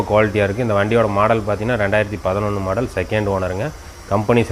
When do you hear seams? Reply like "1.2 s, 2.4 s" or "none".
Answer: none